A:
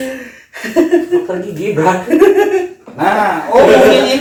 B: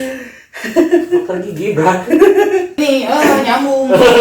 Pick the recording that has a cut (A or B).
B